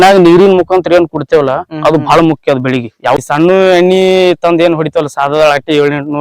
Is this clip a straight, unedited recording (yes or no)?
no